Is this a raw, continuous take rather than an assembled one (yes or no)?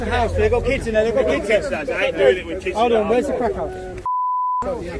yes